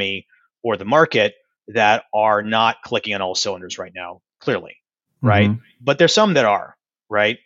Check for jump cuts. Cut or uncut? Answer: uncut